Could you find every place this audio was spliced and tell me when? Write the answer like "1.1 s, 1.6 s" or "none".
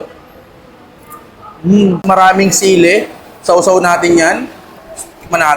2.0 s